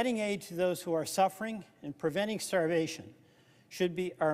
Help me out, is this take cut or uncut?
uncut